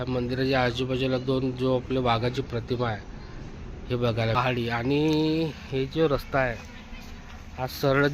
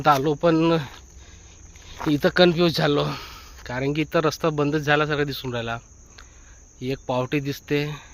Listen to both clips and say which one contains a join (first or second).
first